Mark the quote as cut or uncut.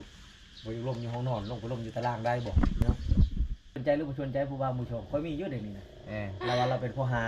cut